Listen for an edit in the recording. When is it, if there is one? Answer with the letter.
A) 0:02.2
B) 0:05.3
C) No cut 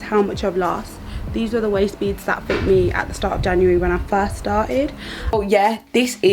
B